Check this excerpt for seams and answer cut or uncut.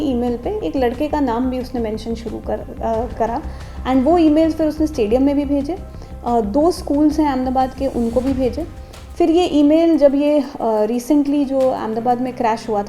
uncut